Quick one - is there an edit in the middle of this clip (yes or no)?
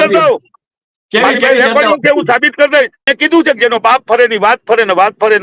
yes